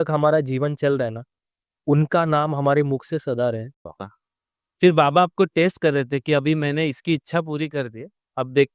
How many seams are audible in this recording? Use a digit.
1